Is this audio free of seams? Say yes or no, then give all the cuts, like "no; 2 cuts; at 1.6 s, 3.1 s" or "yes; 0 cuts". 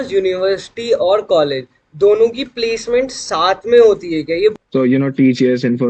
no; 1 cut; at 4.5 s